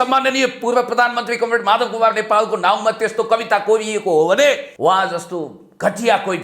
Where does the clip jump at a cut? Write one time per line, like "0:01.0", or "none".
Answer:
0:04.7